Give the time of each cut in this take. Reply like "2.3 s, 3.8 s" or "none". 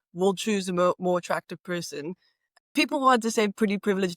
2.6 s